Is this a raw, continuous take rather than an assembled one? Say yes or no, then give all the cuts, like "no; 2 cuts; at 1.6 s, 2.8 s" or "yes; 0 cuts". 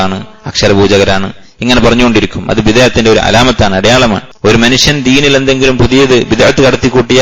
no; 1 cut; at 4.3 s